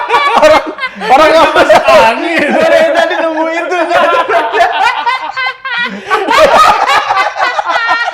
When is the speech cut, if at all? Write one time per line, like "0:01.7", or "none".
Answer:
none